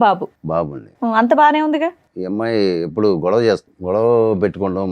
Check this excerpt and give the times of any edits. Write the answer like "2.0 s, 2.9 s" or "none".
2.1 s, 3.7 s